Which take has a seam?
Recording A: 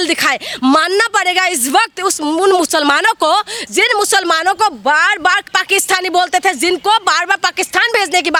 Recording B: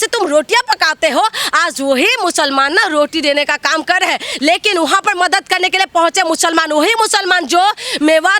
B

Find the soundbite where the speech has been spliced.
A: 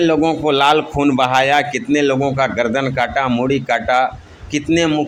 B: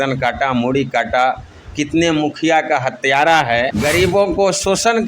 B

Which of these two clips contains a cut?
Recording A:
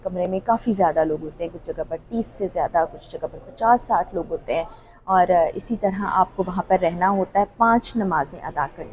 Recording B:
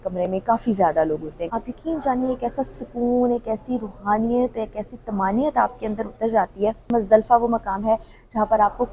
B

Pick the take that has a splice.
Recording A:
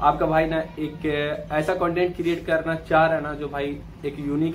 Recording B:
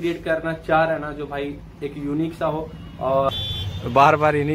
B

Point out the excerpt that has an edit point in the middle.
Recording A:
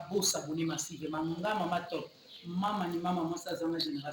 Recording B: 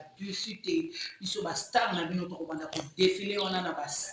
A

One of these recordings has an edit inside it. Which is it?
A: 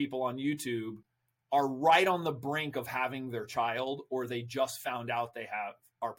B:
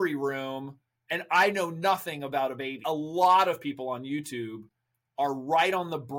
B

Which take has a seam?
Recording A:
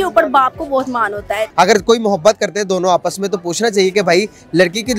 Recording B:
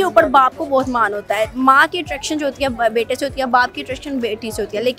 A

